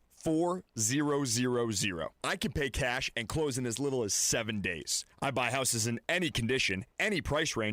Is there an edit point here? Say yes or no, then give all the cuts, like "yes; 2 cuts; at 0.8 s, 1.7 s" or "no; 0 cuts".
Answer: no; 0 cuts